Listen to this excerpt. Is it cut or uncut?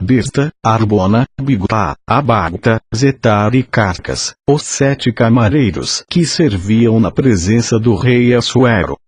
uncut